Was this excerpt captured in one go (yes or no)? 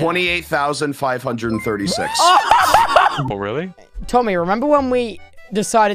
no